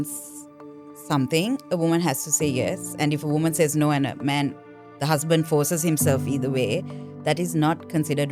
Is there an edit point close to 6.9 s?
no; 0 cuts

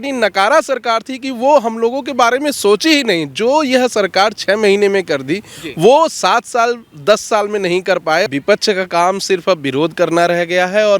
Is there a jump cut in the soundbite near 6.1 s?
no; 1 cut; at 8.3 s

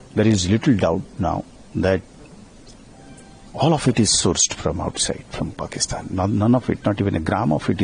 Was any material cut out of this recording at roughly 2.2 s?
no; 0 cuts

